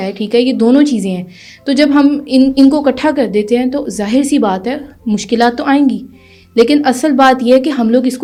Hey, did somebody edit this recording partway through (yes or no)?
no